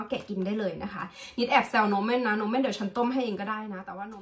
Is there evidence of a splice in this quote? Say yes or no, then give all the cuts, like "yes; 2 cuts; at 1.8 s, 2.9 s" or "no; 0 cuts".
no; 0 cuts